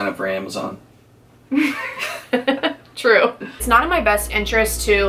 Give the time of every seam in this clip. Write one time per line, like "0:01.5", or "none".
0:03.6